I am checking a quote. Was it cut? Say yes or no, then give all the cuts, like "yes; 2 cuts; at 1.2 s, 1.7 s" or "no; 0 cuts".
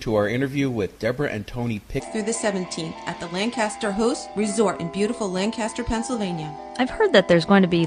no; 0 cuts